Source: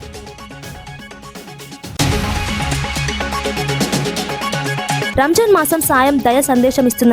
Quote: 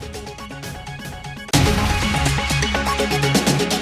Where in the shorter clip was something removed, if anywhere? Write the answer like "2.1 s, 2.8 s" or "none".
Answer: 1.3 s